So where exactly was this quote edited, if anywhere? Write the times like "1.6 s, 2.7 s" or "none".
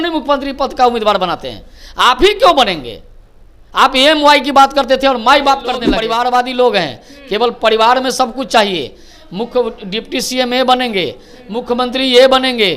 5.9 s